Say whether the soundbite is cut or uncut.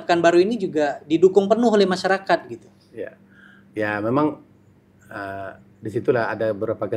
uncut